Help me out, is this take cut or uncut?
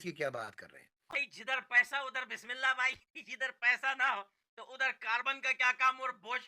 cut